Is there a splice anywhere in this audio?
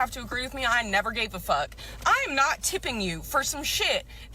no; 0 cuts

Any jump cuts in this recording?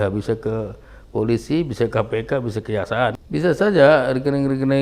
yes; 1 cut; at 3.1 s

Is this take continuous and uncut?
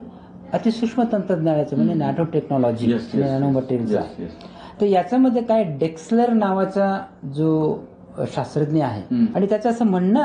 no; 1 cut; at 9.3 s

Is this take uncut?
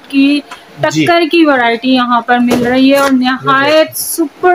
yes; 0 cuts

